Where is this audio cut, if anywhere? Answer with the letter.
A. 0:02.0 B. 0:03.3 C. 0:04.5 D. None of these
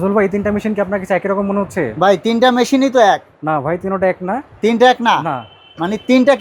D